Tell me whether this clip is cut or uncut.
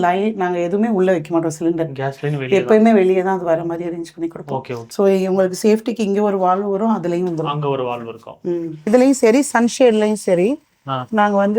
cut